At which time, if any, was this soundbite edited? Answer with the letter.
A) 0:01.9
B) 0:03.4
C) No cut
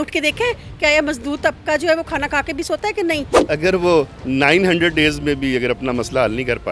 B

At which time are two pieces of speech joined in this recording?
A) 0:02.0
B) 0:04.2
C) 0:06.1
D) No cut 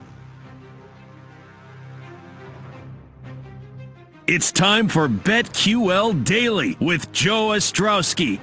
B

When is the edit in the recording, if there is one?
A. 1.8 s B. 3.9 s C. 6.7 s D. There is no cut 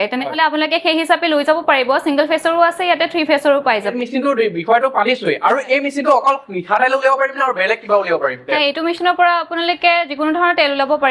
B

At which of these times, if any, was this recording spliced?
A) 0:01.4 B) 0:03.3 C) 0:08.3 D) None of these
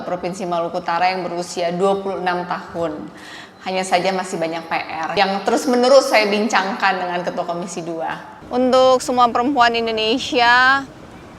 C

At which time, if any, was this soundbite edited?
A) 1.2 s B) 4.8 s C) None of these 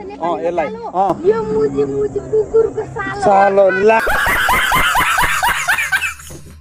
A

